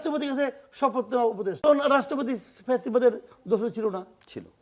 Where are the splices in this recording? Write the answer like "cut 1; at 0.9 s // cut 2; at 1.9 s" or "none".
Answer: cut 1; at 1.6 s